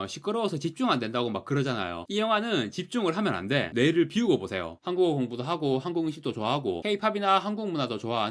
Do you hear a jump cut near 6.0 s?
no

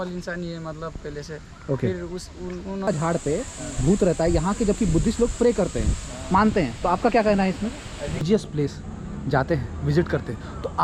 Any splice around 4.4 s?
no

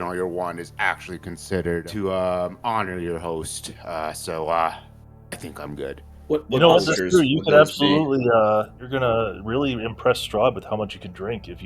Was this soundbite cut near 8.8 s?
yes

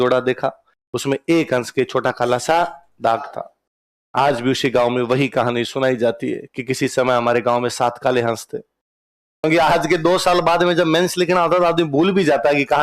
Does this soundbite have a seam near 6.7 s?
no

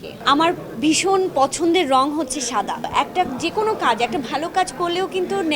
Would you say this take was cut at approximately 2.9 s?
yes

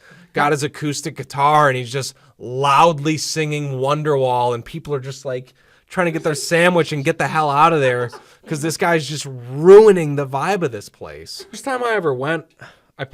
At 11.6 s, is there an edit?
yes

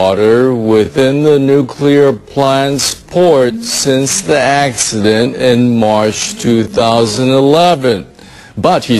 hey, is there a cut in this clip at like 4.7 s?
no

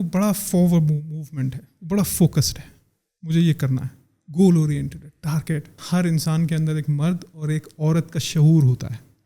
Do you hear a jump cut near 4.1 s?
no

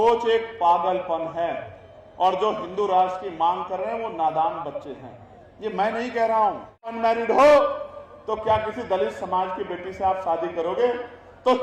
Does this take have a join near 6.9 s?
yes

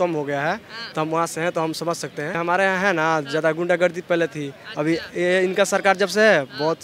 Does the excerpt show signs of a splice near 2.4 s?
yes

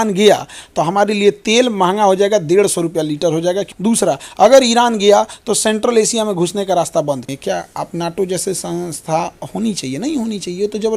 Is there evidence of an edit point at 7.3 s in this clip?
yes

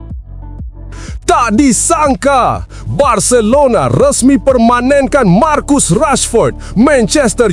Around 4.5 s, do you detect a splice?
no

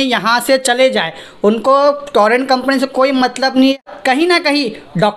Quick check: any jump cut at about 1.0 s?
no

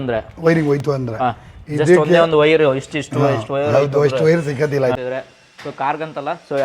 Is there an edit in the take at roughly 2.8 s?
no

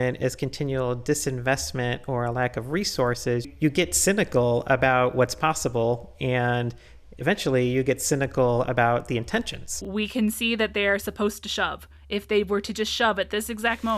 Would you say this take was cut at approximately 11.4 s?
no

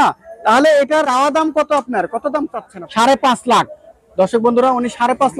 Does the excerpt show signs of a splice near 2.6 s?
yes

